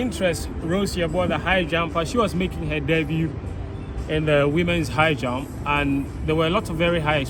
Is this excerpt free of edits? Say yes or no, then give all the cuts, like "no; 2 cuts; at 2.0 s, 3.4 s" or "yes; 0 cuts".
yes; 0 cuts